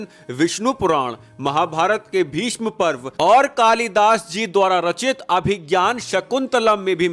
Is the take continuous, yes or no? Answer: yes